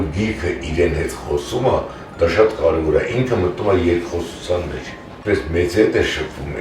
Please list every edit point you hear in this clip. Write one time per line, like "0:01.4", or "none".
0:05.0